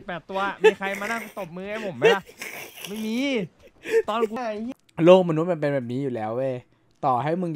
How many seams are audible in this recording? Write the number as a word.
one